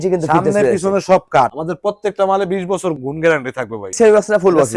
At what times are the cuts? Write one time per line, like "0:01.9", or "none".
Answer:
0:01.5
0:03.0
0:03.9